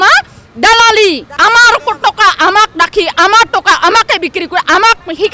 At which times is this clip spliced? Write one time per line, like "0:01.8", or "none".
0:01.3